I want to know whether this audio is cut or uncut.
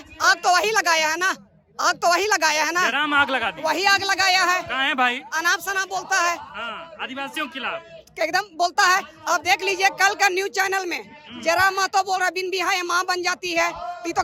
uncut